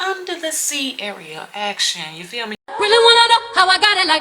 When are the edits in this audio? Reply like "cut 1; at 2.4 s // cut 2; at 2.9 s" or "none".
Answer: cut 1; at 2.6 s